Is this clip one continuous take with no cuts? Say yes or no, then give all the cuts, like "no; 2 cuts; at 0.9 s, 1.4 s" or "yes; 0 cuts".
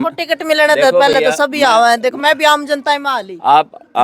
yes; 0 cuts